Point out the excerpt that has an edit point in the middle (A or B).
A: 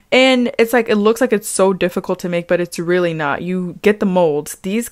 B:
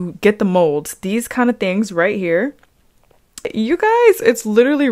B